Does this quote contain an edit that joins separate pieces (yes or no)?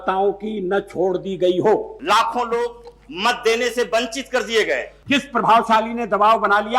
yes